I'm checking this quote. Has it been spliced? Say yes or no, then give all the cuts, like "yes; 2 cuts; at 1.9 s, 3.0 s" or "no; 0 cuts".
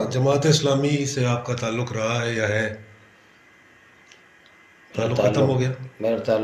no; 0 cuts